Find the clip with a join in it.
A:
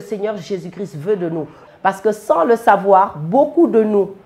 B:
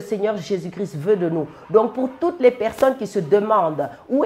A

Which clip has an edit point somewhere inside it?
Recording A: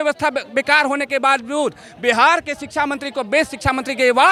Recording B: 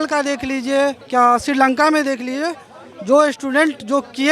B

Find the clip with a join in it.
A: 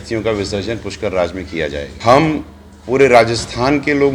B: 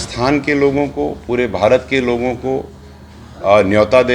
A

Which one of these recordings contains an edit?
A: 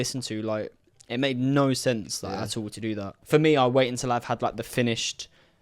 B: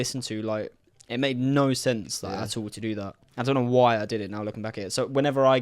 A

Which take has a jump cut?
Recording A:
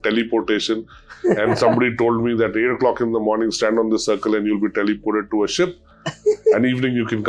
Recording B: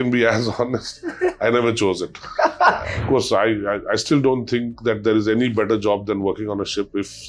B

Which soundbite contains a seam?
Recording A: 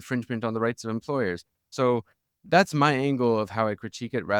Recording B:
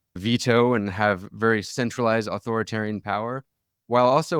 A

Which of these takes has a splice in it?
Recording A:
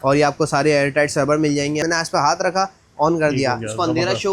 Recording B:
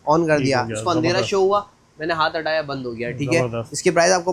A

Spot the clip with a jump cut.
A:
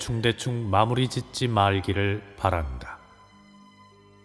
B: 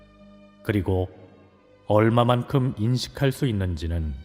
B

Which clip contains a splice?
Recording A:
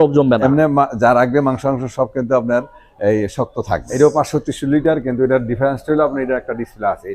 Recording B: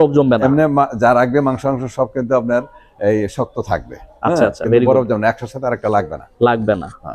A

